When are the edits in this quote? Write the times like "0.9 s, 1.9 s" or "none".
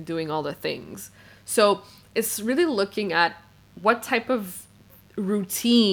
none